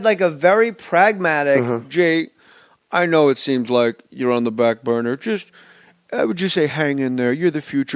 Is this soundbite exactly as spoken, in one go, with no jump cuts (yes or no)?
no